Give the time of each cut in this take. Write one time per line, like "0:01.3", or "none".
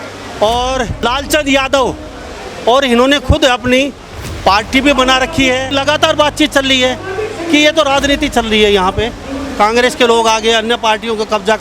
0:05.8